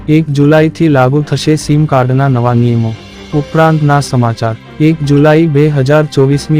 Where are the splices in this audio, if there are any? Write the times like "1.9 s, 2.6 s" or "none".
3.1 s, 4.6 s